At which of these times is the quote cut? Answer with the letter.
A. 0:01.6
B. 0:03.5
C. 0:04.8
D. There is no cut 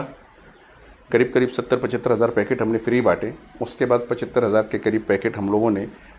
D